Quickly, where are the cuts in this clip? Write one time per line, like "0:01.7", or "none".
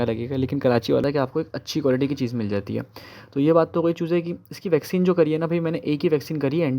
0:01.0

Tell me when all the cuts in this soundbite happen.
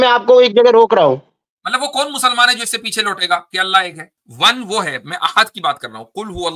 0:04.0

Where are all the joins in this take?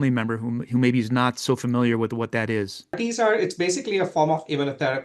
0:03.0

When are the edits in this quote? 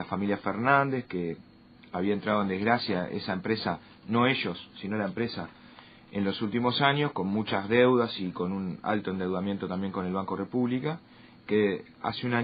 0:08.7

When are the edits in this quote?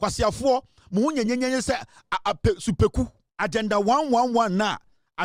0:03.2

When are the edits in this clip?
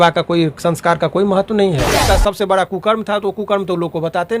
0:02.0

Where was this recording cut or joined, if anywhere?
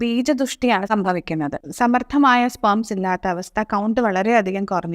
0:01.6

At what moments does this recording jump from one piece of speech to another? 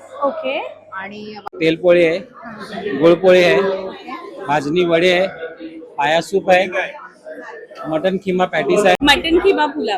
0:01.4
0:09.0

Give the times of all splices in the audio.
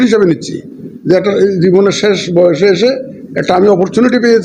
none

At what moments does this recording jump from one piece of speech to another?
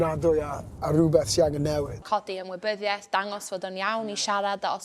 0:02.0

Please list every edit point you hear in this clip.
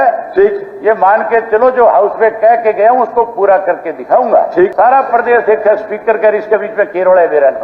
0:04.7

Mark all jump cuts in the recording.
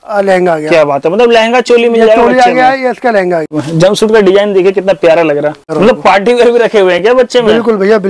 0:03.6
0:05.7

